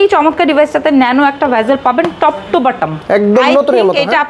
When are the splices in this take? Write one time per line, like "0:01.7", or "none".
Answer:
none